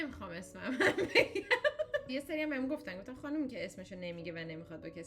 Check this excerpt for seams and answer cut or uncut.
cut